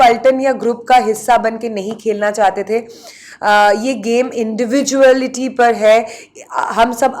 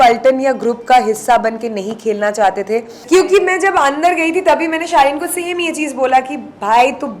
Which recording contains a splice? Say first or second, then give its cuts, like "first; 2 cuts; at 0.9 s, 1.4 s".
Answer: second; 1 cut; at 2.9 s